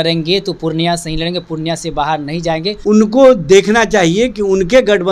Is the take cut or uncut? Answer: cut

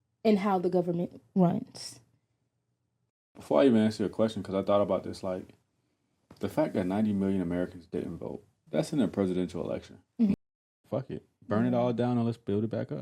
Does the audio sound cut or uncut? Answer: cut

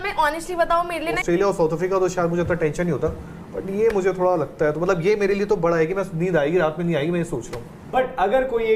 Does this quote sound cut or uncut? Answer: cut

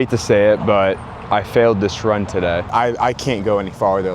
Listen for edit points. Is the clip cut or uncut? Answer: cut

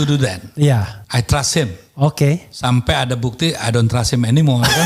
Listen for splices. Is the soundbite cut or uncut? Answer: cut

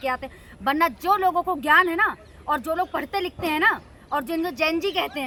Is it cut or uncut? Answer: uncut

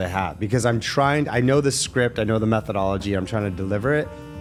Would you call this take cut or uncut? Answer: uncut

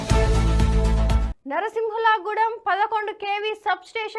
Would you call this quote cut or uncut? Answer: uncut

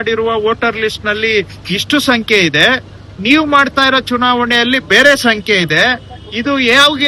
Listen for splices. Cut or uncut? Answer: uncut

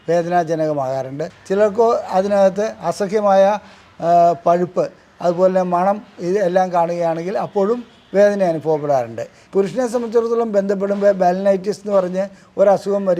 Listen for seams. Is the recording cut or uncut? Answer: cut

